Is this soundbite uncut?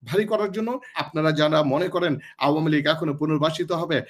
no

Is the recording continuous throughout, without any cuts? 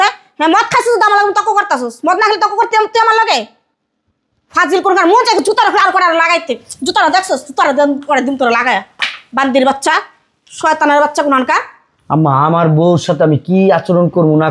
yes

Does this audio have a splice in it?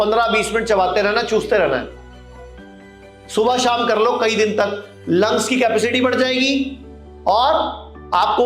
no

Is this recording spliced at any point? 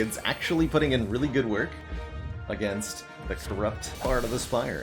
yes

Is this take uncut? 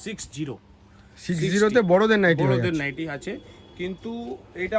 yes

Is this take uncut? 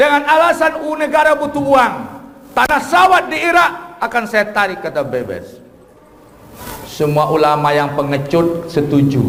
yes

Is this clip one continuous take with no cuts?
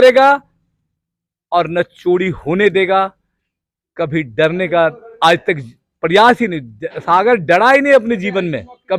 yes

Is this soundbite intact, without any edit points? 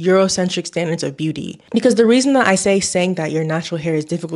no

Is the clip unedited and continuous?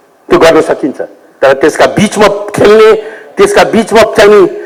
yes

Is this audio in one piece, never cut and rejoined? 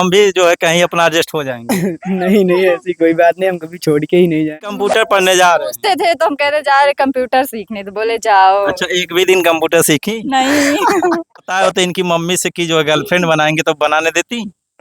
no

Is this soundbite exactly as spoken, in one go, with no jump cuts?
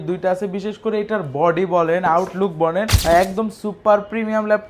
no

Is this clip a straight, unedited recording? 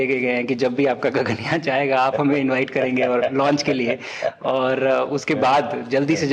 yes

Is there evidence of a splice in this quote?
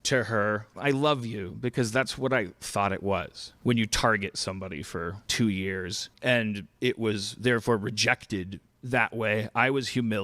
yes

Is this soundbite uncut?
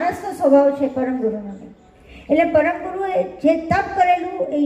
yes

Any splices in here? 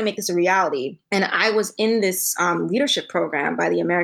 yes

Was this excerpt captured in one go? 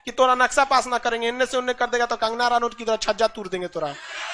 yes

